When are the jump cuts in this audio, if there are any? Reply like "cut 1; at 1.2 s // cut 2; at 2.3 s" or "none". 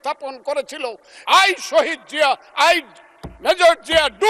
cut 1; at 1.1 s